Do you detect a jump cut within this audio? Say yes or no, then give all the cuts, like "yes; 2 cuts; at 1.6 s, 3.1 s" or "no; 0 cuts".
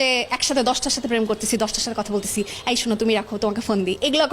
no; 0 cuts